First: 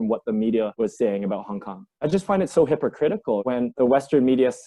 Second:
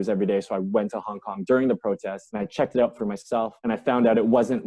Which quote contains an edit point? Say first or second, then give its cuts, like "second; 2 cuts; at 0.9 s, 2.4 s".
first; 1 cut; at 1.9 s